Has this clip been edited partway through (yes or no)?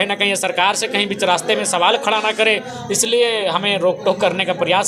no